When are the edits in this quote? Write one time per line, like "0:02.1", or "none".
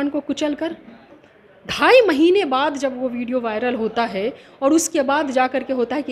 0:01.1

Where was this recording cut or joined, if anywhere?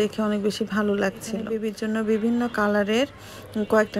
0:01.5

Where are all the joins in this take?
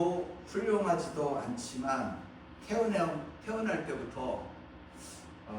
none

